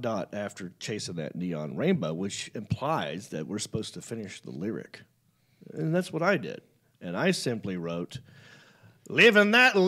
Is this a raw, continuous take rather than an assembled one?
yes; 0 cuts

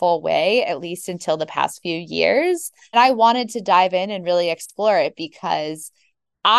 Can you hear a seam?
yes; 1 cut; at 2.9 s

